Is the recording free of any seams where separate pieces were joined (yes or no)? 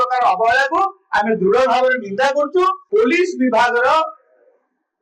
no